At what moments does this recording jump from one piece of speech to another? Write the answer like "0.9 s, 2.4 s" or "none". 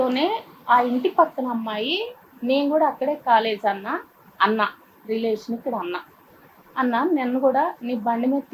none